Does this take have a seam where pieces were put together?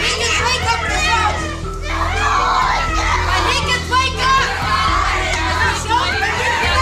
no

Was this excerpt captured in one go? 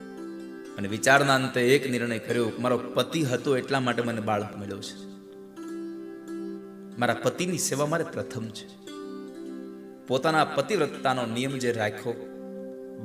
no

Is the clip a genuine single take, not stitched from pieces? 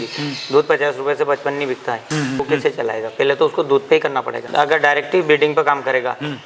no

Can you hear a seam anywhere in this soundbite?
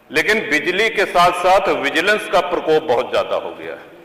no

